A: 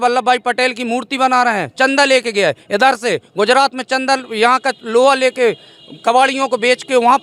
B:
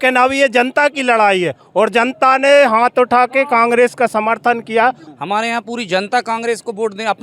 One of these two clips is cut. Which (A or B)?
B